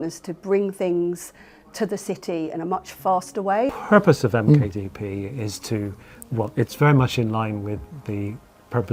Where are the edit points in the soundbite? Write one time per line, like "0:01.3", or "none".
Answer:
none